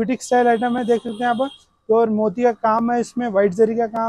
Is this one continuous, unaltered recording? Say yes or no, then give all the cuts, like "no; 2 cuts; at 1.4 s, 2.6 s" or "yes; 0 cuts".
yes; 0 cuts